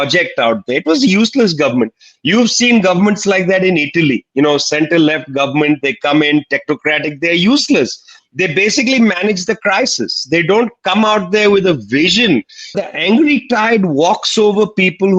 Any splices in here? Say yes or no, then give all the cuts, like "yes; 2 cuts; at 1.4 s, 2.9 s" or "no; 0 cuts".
yes; 1 cut; at 12.8 s